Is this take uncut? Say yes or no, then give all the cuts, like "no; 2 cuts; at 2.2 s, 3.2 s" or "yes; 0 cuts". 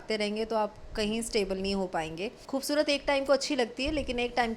no; 1 cut; at 2.4 s